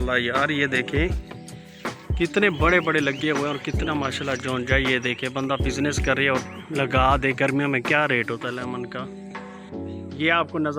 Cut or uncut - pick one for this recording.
uncut